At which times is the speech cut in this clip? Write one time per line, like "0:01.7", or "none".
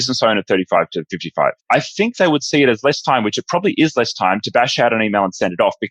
0:01.4